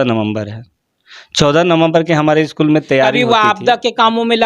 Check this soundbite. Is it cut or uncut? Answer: cut